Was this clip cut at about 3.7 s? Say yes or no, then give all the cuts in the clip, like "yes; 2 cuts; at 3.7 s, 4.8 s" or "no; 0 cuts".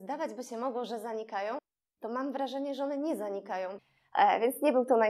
yes; 1 cut; at 3.7 s